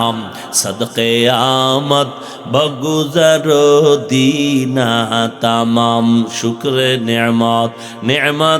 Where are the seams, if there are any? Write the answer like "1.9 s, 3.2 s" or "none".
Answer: none